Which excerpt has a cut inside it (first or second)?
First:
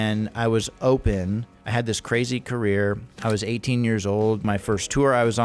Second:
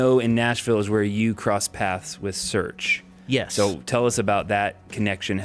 first